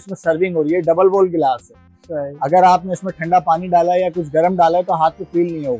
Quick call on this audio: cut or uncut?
uncut